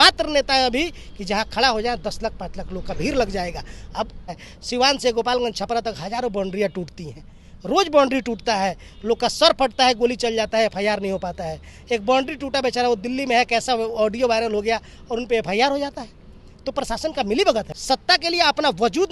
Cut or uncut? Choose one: cut